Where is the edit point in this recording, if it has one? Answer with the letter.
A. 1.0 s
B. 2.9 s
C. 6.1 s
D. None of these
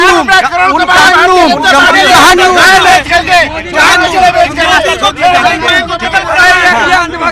D